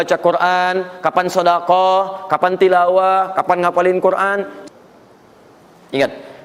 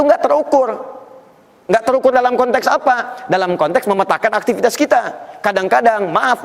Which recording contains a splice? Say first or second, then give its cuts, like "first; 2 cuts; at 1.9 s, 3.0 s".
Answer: first; 1 cut; at 4.6 s